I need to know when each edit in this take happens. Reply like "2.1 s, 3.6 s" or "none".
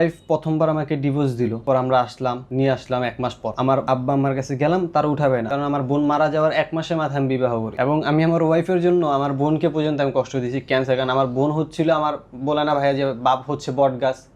1.6 s, 2.4 s, 3.8 s, 5.5 s, 7.7 s